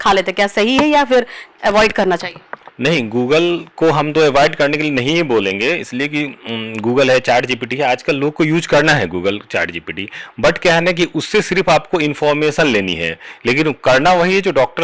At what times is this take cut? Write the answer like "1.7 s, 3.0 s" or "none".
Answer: none